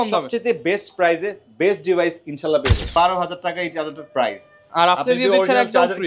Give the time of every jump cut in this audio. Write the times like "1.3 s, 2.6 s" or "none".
2.9 s